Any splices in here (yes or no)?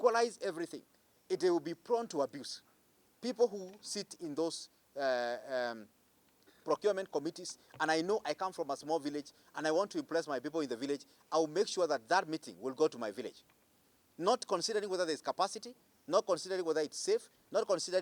no